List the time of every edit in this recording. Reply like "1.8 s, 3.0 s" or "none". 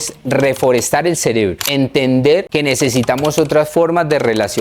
1.6 s, 2.5 s